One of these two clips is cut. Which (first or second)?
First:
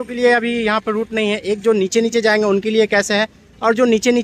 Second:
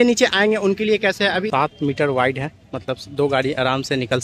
second